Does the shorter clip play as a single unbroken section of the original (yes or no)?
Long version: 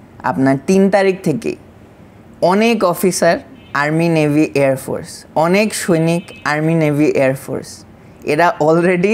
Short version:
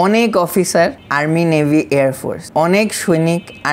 no